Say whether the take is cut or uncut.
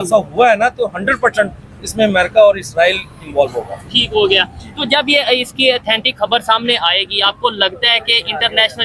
uncut